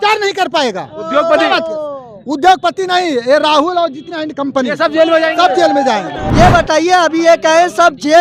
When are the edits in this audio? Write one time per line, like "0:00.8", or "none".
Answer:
0:06.2